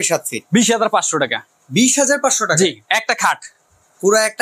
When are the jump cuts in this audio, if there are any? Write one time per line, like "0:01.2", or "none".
none